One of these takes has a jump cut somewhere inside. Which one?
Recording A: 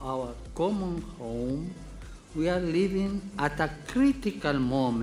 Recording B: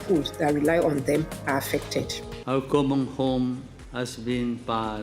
B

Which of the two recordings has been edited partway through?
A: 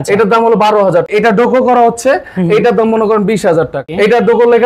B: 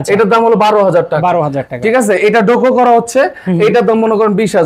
A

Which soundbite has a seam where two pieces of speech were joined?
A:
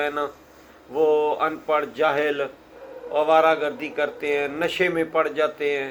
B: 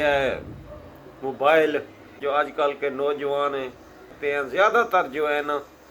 B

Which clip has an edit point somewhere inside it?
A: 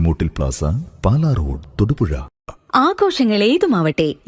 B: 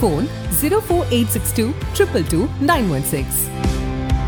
A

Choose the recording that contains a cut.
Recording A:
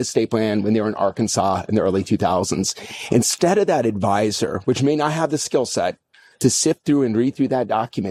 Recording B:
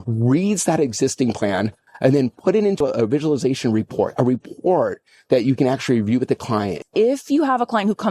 B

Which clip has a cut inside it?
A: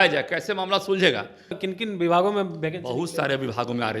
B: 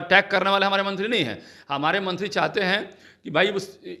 A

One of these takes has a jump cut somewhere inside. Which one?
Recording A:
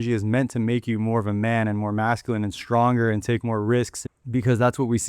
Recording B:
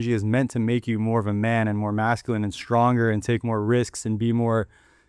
A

